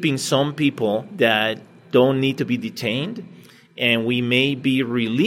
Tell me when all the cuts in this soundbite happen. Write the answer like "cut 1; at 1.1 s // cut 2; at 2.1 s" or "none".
cut 1; at 1.1 s